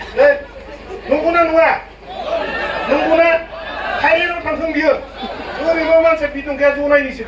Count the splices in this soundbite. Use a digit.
0